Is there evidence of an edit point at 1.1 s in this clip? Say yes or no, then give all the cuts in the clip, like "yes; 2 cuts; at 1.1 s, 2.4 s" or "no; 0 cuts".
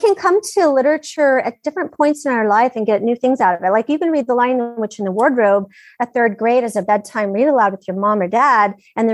yes; 1 cut; at 1.1 s